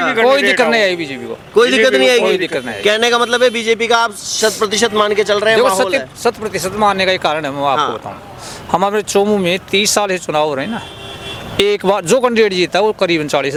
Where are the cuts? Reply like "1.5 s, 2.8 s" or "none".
none